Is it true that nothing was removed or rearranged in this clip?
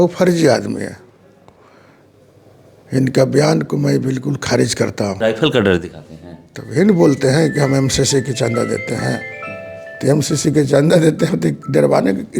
no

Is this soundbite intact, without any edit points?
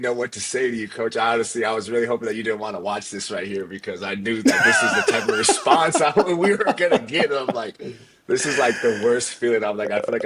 yes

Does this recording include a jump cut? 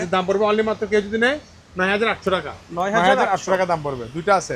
no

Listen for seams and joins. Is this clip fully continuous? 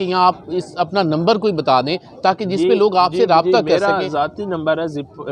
yes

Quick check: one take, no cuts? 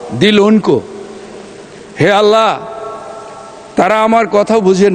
yes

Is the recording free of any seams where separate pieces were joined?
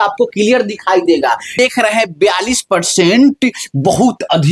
no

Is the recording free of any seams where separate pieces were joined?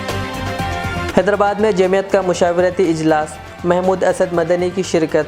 no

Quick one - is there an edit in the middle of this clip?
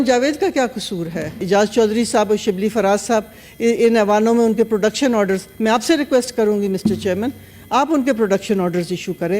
yes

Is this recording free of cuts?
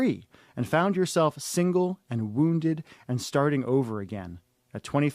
no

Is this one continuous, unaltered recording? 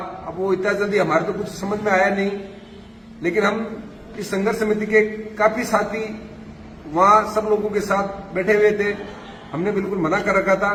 yes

